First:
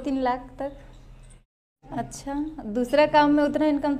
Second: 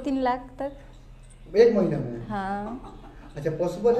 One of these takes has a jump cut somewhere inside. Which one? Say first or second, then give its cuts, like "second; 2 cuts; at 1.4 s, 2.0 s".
first; 1 cut; at 1.5 s